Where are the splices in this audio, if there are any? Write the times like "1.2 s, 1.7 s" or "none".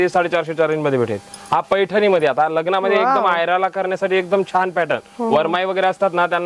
none